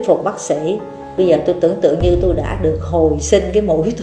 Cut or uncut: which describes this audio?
cut